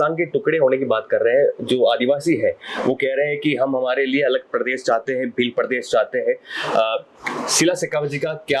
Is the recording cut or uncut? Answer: uncut